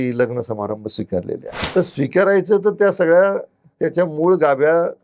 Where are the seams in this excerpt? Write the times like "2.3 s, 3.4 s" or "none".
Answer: 1.5 s